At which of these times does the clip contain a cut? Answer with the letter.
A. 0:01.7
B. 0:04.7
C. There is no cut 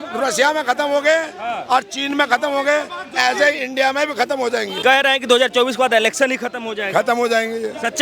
B